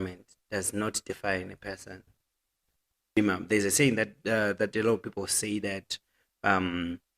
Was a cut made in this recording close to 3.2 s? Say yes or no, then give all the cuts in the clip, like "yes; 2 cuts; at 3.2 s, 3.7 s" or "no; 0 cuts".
yes; 1 cut; at 3.2 s